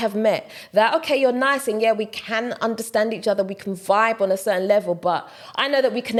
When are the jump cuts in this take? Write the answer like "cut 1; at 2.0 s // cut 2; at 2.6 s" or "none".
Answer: none